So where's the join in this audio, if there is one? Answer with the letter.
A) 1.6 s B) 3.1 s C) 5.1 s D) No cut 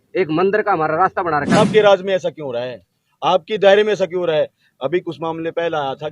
A